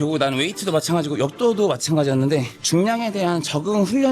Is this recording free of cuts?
no; 1 cut; at 2.6 s

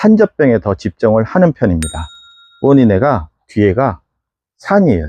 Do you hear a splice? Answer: no; 0 cuts

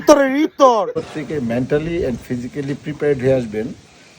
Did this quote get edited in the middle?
yes; 1 cut; at 1.0 s

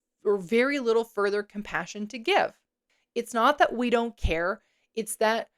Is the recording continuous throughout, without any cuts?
no; 1 cut; at 3.0 s

